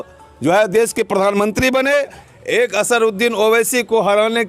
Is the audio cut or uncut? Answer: cut